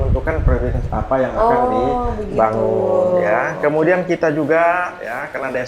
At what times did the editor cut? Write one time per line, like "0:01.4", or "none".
none

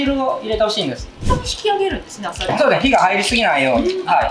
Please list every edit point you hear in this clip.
0:01.1

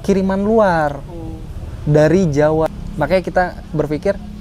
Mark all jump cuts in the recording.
0:02.7

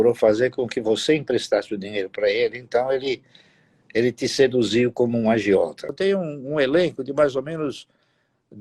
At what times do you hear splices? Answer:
0:05.9

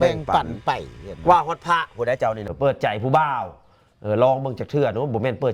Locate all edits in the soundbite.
0:02.5

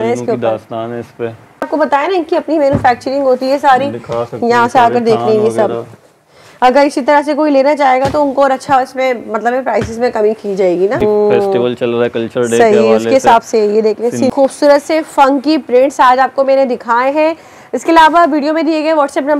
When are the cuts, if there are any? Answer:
0:01.7
0:11.0
0:14.3

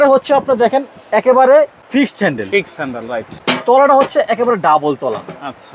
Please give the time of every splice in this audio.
0:01.8
0:03.3

